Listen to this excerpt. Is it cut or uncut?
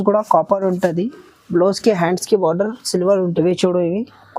cut